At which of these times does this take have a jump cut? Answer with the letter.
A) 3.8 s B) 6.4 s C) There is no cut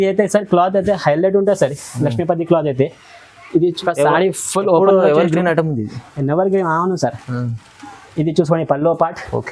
A